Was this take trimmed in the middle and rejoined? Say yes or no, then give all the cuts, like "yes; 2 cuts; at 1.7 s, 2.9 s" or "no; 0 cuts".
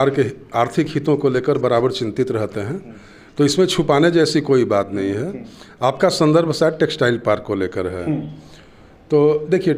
no; 0 cuts